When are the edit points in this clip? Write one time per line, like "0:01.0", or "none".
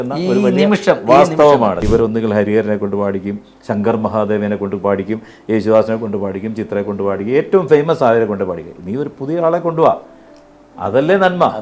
0:01.8

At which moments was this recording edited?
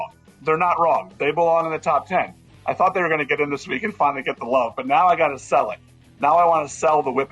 0:02.5

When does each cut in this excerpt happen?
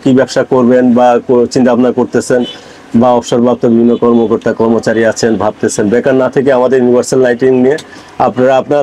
none

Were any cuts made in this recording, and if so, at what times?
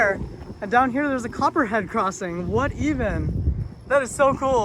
none

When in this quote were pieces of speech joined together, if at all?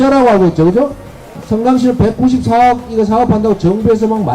0:01.3

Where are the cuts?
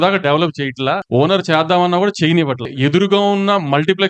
0:01.0
0:02.7

